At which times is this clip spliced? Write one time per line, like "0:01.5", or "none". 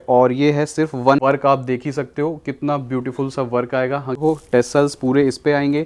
0:01.2
0:04.2